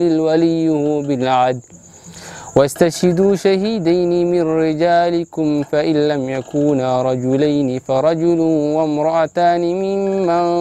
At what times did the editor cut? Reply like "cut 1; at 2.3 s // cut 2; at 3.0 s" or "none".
none